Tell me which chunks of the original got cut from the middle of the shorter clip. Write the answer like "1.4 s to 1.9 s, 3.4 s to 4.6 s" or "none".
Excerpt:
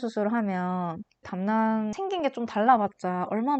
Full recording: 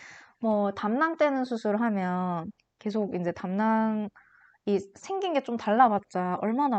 2.8 s to 3.4 s, 4.1 s to 5.1 s

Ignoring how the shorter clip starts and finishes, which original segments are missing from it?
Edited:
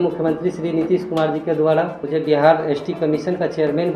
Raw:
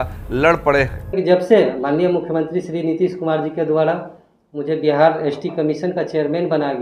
4.1 s to 4.5 s

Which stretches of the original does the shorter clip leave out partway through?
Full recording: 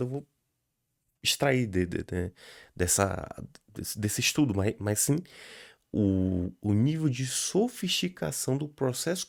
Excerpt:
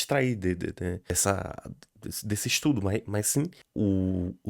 2.4 s to 2.8 s, 5.3 s to 5.8 s

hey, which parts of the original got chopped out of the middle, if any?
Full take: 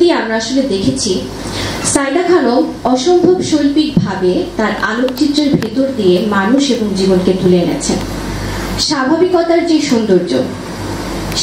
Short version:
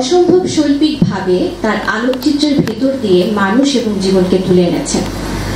none

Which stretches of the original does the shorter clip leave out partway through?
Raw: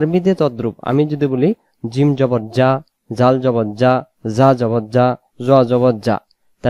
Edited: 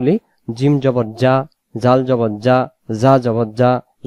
none

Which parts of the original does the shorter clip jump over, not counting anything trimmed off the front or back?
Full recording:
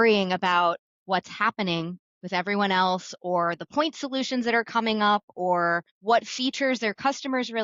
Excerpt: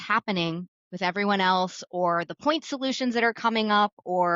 none

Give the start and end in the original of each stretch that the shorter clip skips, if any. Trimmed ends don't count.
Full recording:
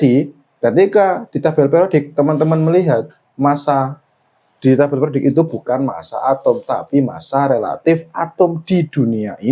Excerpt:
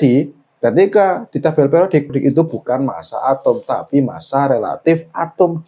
2.1 s to 5.1 s

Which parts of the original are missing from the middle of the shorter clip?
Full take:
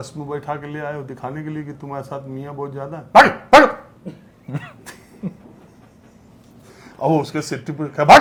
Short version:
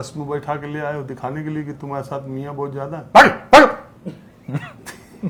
none

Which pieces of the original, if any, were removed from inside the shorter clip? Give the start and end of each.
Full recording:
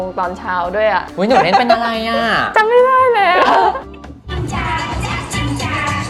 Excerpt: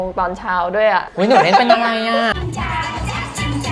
2.4 s to 4.3 s

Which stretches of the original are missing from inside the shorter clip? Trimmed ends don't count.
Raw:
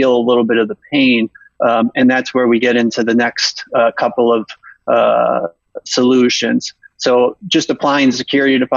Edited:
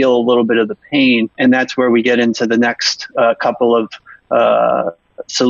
1.4 s to 1.9 s

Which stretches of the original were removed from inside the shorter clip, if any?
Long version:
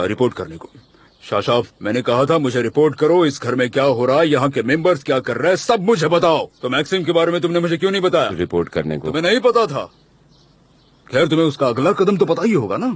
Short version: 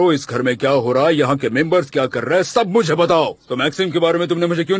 none

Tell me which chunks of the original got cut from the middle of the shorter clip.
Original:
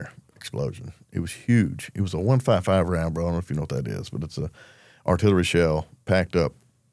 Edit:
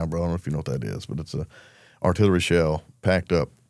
none

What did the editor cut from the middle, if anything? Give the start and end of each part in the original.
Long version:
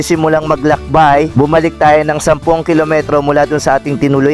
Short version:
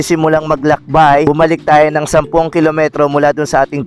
1.3 s to 1.4 s

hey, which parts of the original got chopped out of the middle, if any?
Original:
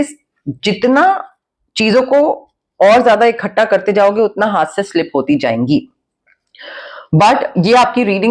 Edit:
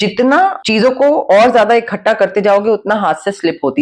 1.6 s to 2.5 s

